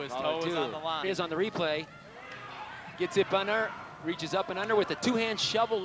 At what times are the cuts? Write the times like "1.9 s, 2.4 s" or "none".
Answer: 1.0 s